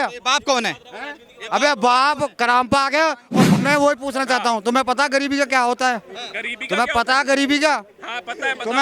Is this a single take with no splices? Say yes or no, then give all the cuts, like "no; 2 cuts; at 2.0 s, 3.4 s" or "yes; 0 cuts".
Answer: no; 1 cut; at 3.5 s